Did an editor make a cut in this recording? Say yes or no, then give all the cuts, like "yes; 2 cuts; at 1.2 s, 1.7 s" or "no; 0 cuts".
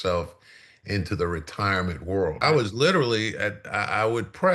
yes; 1 cut; at 2.4 s